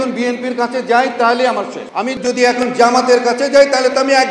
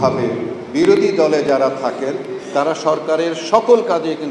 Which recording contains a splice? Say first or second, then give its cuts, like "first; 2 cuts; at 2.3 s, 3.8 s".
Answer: first; 1 cut; at 2.1 s